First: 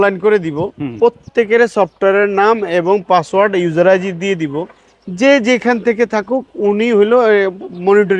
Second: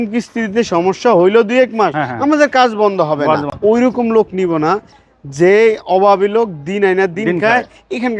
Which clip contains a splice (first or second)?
second